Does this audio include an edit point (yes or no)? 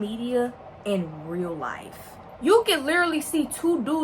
yes